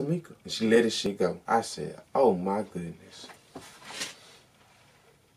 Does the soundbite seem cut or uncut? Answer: cut